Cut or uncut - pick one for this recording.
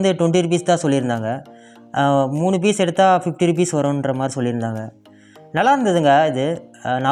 uncut